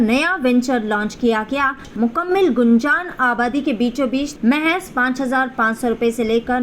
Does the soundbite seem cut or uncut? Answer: cut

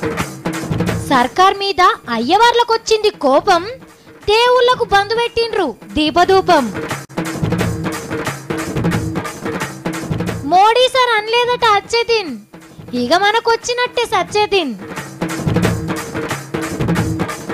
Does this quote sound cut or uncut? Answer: cut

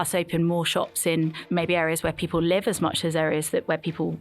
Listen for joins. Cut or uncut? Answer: cut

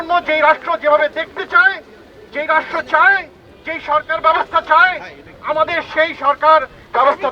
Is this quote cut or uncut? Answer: uncut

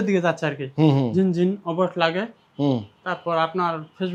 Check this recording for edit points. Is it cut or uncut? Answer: uncut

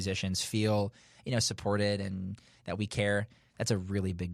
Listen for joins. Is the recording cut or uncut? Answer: uncut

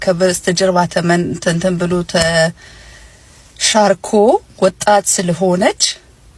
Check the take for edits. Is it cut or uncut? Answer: uncut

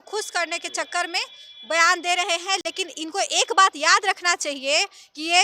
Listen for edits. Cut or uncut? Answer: uncut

